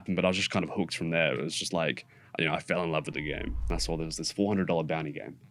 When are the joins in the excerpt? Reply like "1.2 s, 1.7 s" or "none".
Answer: 3.6 s